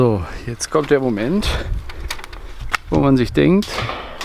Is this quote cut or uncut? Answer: uncut